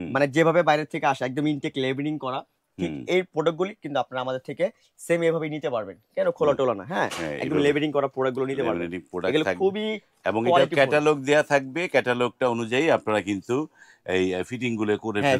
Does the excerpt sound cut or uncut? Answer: uncut